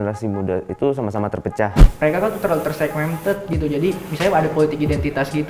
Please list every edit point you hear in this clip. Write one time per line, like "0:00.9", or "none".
0:01.8